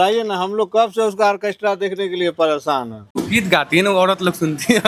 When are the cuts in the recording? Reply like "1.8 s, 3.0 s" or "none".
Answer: 3.2 s